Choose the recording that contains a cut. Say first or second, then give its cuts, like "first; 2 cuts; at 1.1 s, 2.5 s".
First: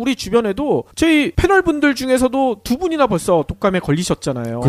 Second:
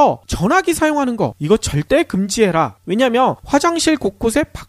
second; 1 cut; at 3.6 s